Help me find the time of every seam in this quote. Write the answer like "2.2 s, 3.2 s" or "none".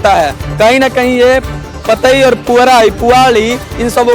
none